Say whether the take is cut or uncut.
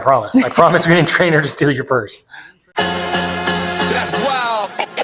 cut